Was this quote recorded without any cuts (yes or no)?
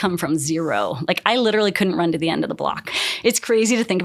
no